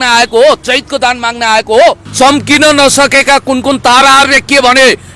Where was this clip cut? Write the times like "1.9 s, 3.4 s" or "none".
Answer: 2.0 s